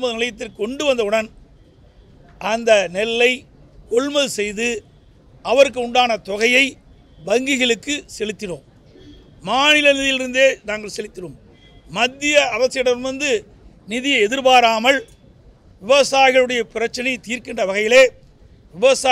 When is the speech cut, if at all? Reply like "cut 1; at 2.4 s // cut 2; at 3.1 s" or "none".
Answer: none